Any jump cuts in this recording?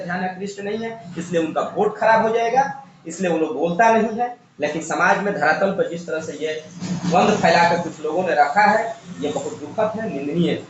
no; 0 cuts

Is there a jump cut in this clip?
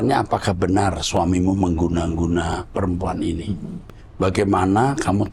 no; 0 cuts

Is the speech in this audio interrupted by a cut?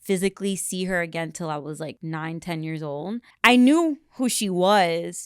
yes; 2 cuts; at 2.0 s, 3.3 s

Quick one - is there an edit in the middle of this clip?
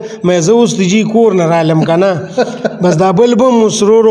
no; 0 cuts

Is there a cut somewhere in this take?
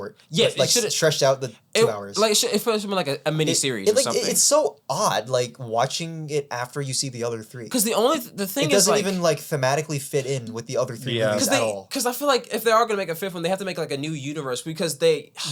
no; 0 cuts

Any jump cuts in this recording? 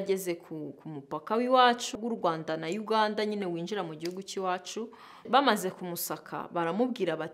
yes; 2 cuts; at 2.0 s, 5.3 s

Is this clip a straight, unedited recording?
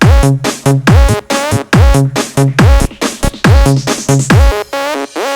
no; 1 cut; at 4.4 s

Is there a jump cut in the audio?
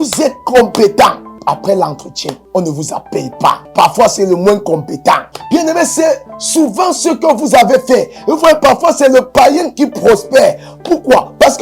yes; 4 cuts; at 1.3 s, 2.4 s, 3.6 s, 5.3 s

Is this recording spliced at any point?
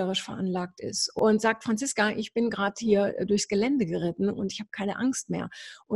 yes; 1 cut; at 1.2 s

